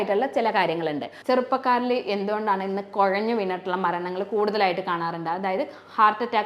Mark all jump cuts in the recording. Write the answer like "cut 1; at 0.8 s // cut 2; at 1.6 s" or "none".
cut 1; at 1.1 s